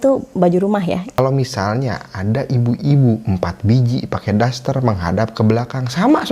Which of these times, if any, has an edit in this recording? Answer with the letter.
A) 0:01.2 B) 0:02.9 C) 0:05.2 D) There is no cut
A